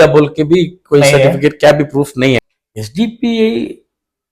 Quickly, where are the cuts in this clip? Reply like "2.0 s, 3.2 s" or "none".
2.6 s